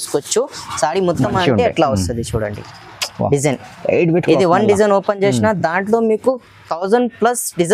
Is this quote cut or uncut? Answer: uncut